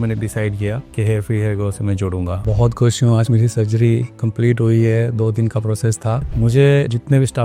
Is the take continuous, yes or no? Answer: no